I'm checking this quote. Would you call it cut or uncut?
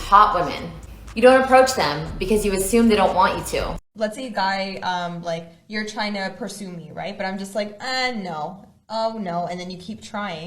cut